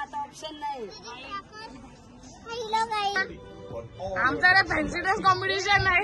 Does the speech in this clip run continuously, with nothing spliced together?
no; 1 cut; at 3.2 s

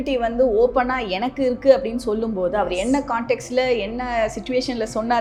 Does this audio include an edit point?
no; 0 cuts

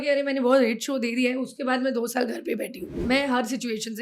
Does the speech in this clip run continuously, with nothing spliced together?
no; 1 cut; at 2.9 s

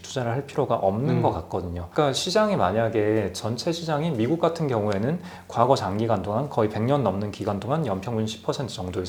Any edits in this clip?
no; 0 cuts

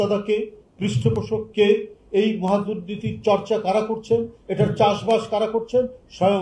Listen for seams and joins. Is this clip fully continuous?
yes; 0 cuts

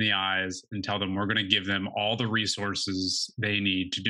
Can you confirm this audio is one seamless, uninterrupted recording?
yes; 0 cuts

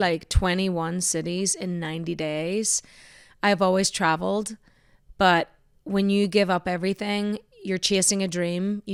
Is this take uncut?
yes; 0 cuts

